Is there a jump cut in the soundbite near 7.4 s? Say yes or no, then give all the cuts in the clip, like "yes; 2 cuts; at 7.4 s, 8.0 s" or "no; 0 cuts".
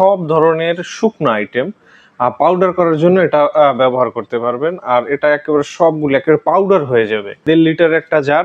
yes; 1 cut; at 7.4 s